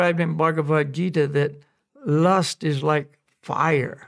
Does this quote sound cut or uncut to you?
uncut